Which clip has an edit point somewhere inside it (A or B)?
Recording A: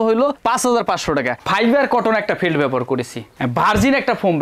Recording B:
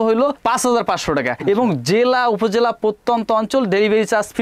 A